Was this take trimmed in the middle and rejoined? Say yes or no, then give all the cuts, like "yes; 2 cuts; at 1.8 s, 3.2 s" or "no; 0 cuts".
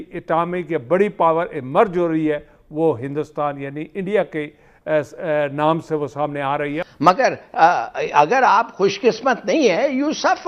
yes; 1 cut; at 6.8 s